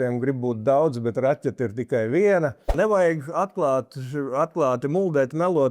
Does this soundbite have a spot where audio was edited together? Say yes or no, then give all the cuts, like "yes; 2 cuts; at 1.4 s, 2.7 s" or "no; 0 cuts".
yes; 1 cut; at 2.7 s